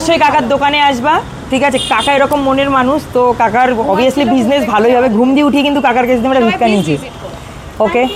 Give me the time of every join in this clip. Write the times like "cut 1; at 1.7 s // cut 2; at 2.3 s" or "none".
none